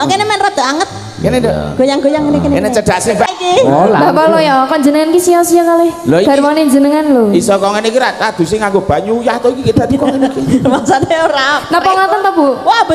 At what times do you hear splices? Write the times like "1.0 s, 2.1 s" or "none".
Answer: 3.3 s